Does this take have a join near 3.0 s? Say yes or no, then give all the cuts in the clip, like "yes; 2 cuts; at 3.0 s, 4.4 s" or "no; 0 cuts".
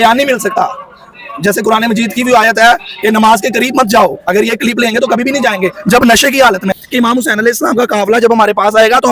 no; 1 cut; at 6.7 s